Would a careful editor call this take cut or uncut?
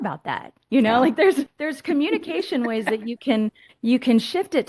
cut